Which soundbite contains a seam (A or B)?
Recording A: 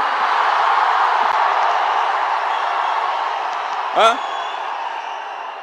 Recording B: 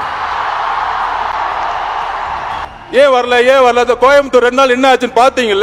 B